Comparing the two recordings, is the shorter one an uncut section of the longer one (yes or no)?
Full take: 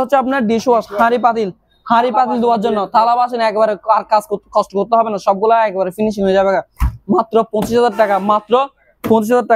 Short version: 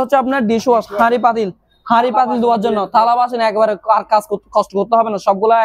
yes